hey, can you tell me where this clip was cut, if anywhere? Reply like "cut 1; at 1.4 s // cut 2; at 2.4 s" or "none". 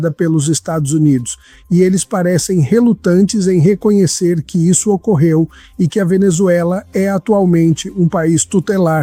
none